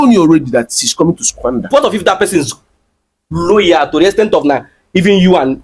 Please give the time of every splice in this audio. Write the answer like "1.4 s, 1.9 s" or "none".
1.7 s